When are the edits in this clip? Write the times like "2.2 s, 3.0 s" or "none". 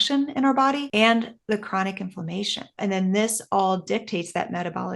0.8 s, 2.8 s